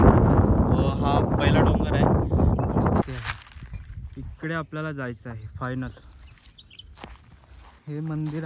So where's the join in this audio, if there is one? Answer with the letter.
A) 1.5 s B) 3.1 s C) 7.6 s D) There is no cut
B